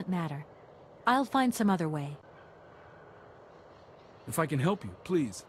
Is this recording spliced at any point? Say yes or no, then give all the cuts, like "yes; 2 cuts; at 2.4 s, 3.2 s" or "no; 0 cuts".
no; 0 cuts